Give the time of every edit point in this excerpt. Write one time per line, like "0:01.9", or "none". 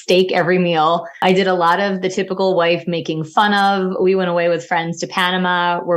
0:01.1